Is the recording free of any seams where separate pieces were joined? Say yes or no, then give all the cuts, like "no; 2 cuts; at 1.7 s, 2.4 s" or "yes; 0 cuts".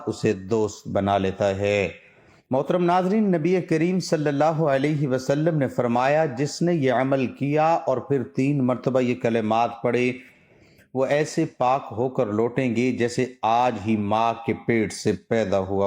yes; 0 cuts